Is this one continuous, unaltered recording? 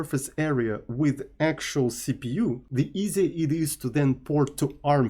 no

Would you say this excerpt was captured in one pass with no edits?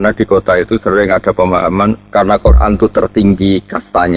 no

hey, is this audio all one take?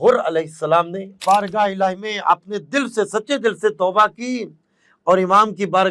no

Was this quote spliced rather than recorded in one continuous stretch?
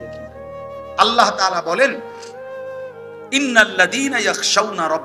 yes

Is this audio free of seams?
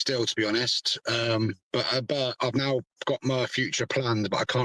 yes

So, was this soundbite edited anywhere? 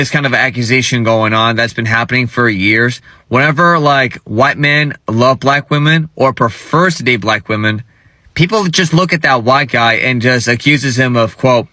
no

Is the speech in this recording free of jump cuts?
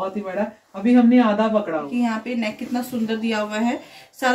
no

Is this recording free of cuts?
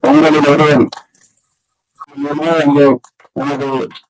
no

